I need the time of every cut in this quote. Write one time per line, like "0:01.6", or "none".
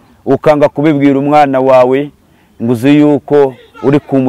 none